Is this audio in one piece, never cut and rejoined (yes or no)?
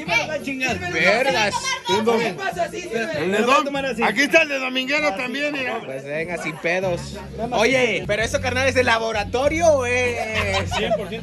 yes